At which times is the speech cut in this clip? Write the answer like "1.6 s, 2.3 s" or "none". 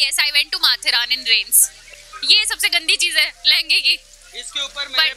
1.9 s

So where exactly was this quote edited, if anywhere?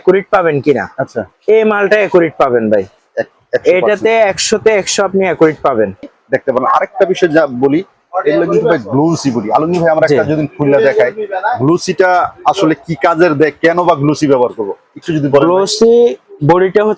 6.1 s

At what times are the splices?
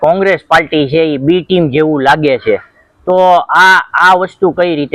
none

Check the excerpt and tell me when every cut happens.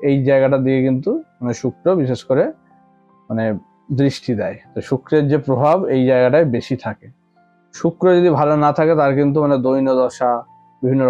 none

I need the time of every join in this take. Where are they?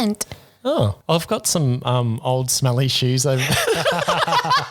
1.0 s

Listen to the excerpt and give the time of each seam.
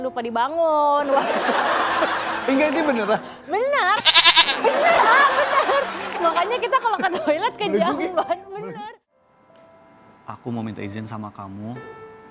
8.8 s

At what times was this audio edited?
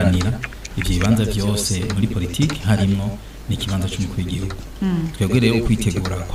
none

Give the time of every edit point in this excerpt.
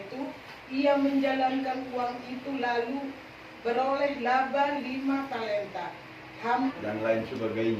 6.7 s

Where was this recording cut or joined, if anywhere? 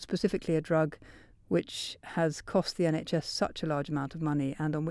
none

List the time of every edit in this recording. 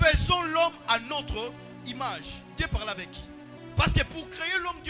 3.6 s

